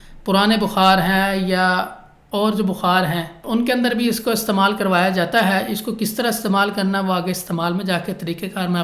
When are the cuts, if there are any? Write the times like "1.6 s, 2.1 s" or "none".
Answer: none